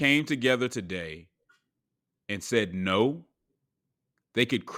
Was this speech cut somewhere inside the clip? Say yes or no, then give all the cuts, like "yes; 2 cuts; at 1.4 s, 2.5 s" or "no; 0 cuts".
no; 0 cuts